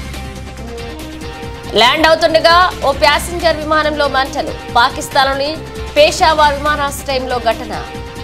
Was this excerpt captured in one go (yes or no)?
yes